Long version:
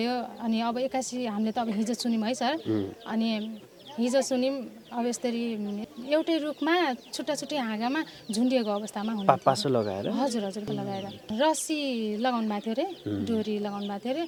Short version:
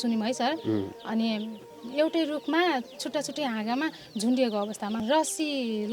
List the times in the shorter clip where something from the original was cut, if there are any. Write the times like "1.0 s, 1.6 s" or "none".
1.8 s, 5.0 s